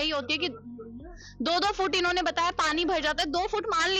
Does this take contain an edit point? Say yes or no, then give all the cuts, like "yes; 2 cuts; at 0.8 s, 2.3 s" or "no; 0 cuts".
no; 0 cuts